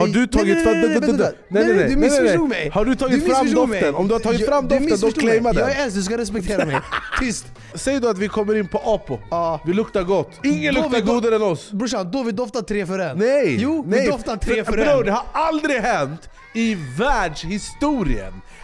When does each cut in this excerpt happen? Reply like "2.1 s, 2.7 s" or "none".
7.8 s, 9.2 s, 10.4 s, 13.1 s